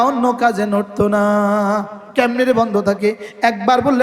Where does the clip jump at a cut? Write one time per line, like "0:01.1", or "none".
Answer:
0:02.1